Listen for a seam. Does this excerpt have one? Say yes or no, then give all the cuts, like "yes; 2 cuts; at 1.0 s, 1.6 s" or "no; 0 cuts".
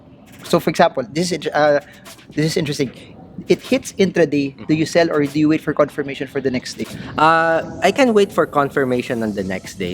no; 0 cuts